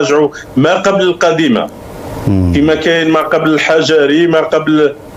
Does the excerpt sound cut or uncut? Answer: uncut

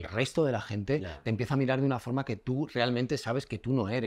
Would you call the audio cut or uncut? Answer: uncut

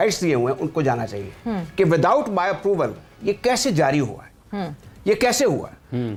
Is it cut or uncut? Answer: uncut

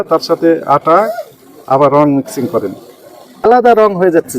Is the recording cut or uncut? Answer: cut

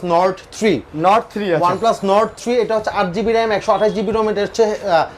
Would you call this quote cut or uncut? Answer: uncut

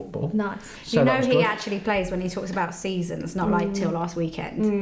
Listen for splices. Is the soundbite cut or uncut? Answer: uncut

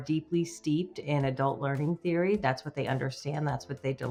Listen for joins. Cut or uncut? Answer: uncut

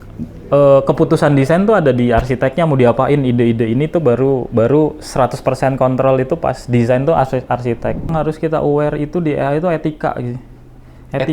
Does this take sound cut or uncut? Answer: cut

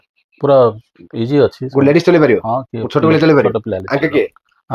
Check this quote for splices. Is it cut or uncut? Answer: uncut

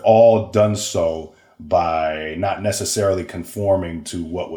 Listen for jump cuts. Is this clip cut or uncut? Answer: uncut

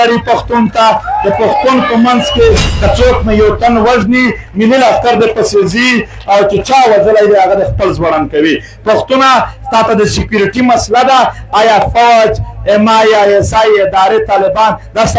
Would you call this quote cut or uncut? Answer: cut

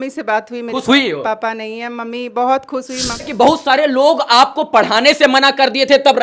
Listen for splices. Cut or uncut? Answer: cut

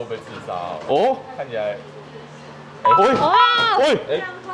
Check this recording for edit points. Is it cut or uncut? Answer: uncut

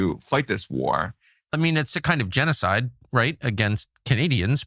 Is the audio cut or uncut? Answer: cut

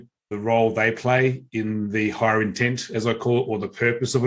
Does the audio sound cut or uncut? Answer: uncut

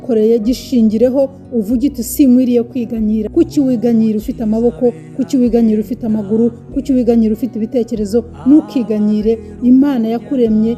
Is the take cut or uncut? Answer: cut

